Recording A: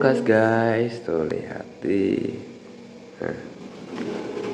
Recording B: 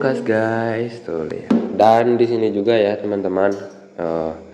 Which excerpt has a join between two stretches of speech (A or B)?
B